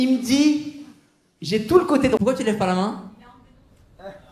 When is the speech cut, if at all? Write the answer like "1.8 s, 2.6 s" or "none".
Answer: 2.2 s